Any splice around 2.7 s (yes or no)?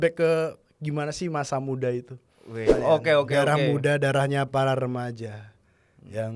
yes